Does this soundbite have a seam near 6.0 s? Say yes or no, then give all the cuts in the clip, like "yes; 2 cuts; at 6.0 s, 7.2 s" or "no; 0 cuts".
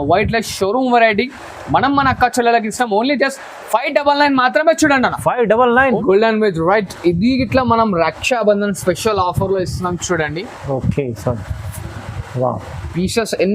yes; 1 cut; at 6.0 s